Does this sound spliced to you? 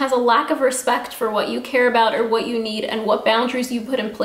no; 0 cuts

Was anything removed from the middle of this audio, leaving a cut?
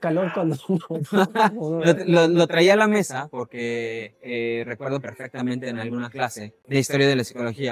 no; 0 cuts

